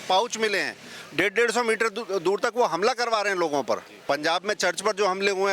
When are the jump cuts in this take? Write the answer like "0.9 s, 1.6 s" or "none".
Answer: 3.9 s